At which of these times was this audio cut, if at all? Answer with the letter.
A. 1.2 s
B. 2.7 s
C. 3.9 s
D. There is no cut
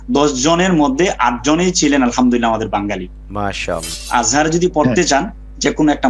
C